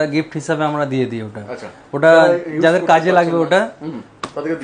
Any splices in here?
no; 0 cuts

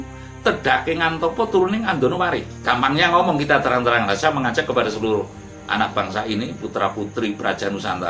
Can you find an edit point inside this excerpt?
yes; 1 cut; at 2.5 s

